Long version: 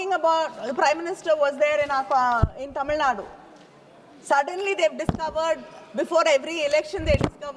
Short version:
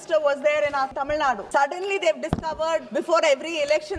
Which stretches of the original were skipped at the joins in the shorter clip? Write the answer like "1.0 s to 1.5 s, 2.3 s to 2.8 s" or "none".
2.1 s to 3.7 s, 5.6 s to 5.9 s